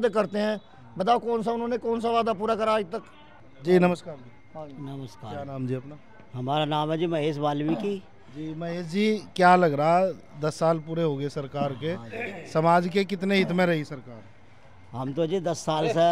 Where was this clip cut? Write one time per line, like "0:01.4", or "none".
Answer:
none